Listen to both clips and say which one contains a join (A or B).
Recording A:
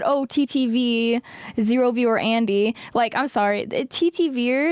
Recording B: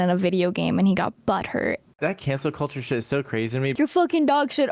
B